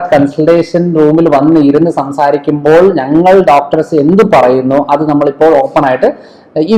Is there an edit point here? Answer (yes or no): no